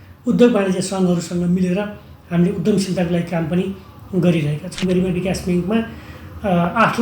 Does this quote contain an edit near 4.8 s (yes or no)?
yes